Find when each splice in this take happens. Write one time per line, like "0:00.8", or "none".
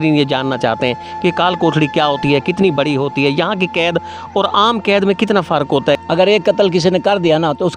0:06.0